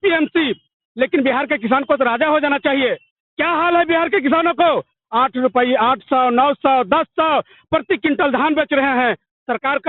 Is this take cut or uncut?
uncut